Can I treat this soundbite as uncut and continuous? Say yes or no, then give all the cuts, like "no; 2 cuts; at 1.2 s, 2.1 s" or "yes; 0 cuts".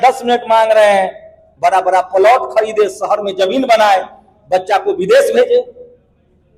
no; 1 cut; at 1.4 s